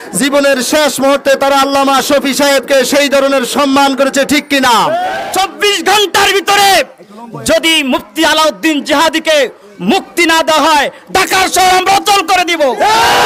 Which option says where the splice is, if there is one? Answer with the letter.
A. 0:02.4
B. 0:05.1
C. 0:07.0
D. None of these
B